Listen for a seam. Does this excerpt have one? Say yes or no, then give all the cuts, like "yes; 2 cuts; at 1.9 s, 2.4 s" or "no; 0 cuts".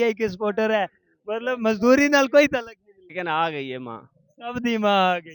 yes; 1 cut; at 3.1 s